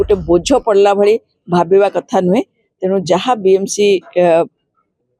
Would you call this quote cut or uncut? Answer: uncut